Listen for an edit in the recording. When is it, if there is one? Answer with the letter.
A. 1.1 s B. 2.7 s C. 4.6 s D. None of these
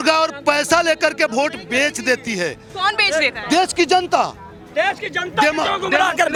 D